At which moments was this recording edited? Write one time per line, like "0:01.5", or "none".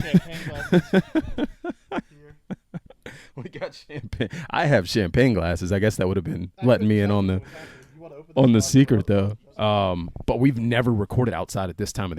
0:09.4